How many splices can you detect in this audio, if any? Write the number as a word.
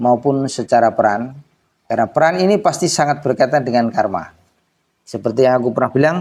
zero